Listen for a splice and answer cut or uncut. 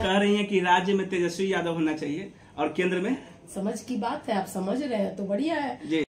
uncut